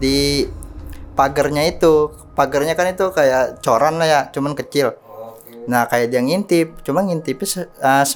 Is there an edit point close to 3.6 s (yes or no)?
no